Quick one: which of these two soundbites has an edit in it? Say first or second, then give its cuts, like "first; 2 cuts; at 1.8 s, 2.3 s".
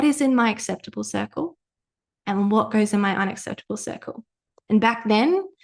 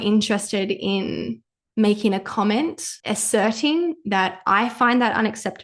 second; 1 cut; at 2.9 s